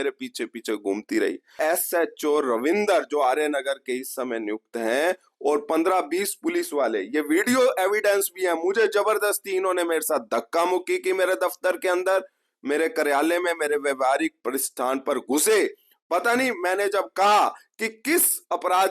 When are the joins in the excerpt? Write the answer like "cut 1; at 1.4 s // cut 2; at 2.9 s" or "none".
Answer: cut 1; at 1.6 s